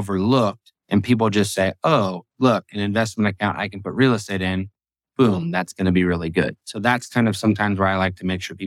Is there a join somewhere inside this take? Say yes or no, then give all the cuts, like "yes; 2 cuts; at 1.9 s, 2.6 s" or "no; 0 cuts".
no; 0 cuts